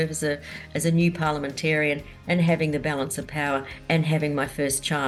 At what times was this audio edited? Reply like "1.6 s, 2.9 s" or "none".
none